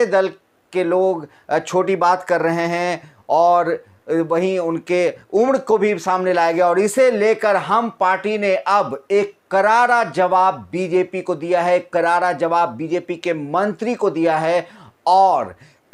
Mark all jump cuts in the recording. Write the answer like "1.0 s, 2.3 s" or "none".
none